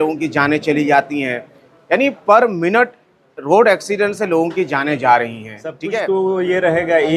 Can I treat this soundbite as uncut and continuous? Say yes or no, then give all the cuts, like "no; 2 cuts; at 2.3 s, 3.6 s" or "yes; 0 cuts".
no; 1 cut; at 5.8 s